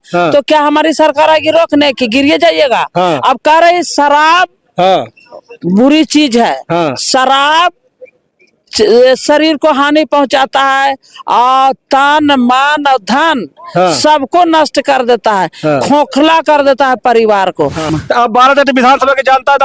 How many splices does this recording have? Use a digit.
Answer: 1